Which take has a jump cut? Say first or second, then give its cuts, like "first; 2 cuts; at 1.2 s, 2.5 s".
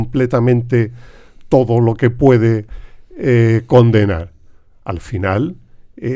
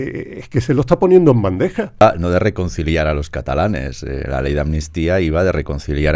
second; 1 cut; at 2.0 s